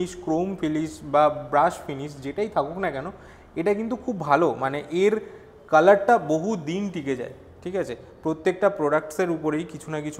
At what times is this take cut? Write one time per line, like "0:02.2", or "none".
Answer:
none